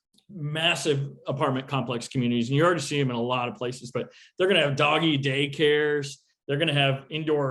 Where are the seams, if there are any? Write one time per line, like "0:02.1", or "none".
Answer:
none